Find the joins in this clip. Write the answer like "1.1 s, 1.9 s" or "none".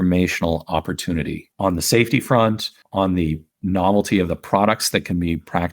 1.4 s, 2.7 s, 3.5 s